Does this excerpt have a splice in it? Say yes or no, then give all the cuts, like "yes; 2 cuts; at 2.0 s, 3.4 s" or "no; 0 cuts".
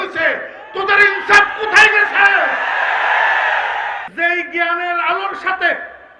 yes; 1 cut; at 4.1 s